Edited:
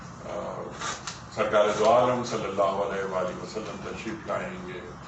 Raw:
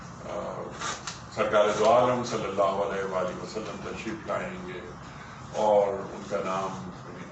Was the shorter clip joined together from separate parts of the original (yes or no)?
no